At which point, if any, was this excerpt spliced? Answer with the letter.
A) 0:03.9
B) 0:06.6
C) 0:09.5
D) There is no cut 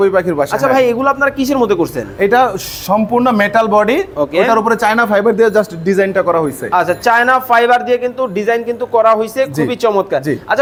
D